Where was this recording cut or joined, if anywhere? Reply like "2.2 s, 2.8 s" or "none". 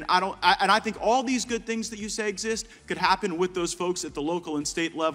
none